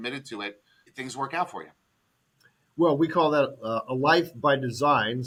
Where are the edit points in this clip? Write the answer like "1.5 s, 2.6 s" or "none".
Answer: none